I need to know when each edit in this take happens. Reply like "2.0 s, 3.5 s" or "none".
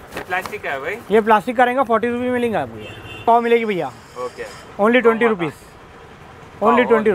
3.0 s